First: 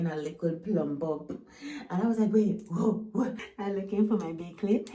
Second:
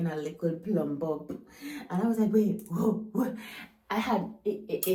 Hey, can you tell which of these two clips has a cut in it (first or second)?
first